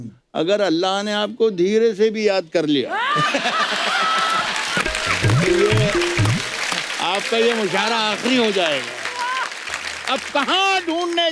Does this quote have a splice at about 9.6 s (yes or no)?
yes